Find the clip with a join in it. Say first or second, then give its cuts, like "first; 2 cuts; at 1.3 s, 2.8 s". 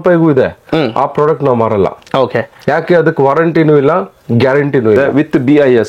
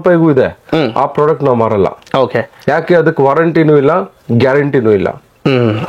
first; 1 cut; at 5.0 s